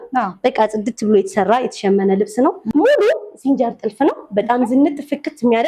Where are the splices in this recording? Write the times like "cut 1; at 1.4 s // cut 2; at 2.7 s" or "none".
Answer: cut 1; at 2.7 s